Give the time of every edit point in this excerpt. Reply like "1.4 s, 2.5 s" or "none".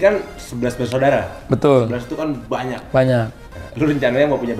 none

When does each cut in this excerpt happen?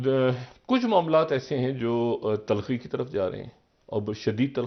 none

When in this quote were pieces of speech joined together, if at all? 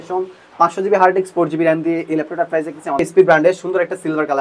3.0 s

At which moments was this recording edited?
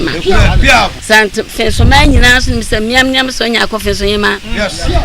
1.0 s

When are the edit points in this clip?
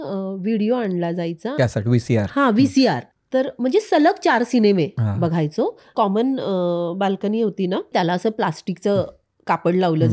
1.6 s, 3.1 s, 5.8 s, 7.9 s

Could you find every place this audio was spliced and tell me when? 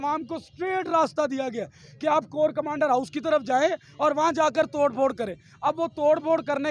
none

